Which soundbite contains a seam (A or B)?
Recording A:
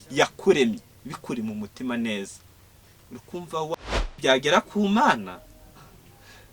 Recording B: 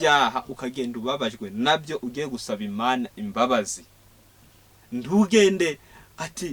A